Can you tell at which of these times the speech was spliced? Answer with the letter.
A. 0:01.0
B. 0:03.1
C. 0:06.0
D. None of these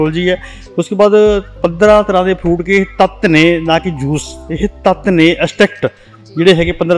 D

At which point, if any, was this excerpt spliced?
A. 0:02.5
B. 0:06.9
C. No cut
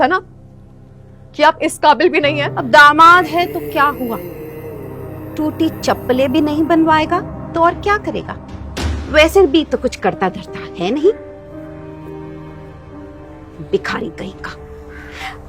A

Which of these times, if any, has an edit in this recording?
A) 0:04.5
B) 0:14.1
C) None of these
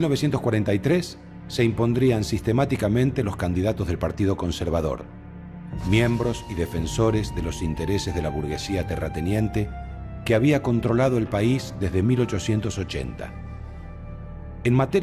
A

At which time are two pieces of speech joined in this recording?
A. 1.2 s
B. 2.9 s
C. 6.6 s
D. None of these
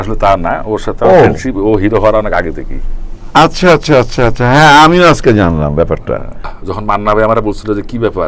C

